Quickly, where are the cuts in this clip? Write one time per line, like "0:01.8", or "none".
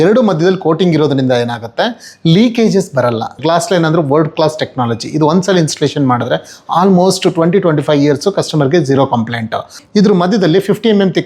0:03.3
0:09.8